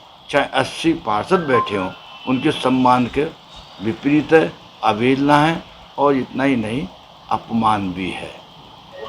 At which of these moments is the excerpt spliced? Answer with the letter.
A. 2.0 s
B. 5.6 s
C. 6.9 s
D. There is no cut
D